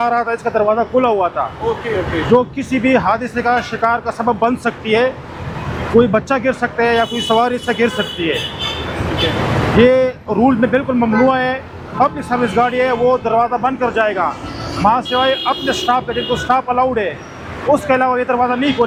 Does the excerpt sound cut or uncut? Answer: uncut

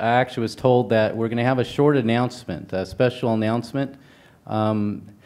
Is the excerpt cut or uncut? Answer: cut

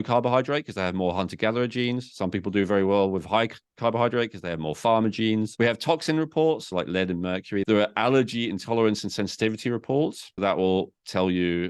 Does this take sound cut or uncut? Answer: cut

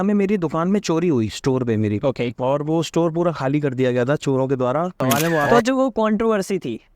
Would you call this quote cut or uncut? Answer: cut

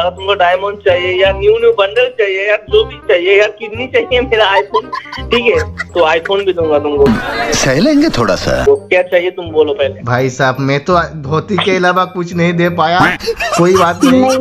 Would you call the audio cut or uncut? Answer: uncut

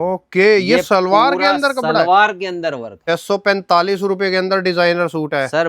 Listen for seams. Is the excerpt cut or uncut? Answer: cut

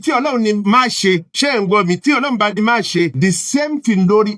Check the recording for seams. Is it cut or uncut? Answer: cut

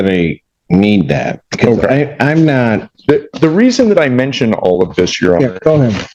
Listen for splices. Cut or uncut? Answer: uncut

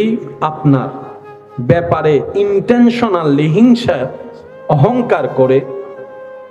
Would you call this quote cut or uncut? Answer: uncut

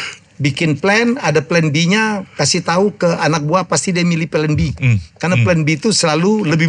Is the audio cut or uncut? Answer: uncut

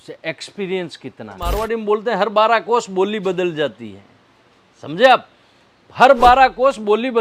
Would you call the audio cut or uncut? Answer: cut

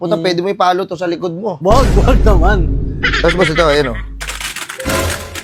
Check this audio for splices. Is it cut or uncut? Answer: uncut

